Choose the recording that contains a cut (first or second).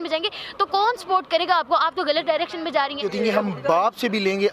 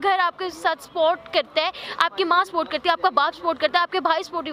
first